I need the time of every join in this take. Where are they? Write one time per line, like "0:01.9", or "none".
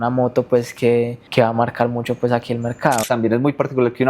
0:01.2
0:03.0